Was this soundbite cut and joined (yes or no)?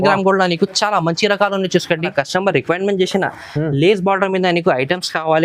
yes